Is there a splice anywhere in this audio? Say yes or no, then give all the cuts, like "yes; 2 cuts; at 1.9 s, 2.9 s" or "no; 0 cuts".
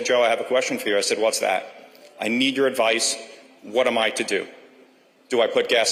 no; 0 cuts